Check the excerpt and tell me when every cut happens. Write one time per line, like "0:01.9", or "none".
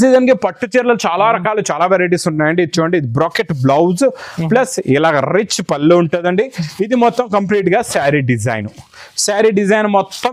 none